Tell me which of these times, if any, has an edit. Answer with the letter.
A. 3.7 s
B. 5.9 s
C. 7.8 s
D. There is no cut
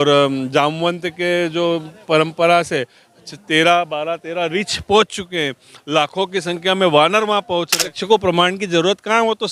C